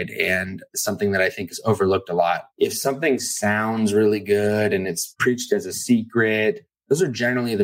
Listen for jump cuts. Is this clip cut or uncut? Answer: cut